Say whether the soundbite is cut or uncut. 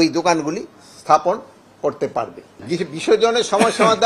cut